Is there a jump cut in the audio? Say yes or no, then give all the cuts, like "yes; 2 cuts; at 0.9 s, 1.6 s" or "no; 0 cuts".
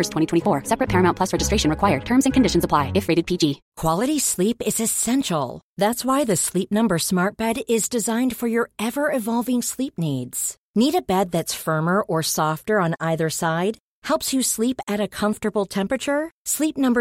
yes; 1 cut; at 3.6 s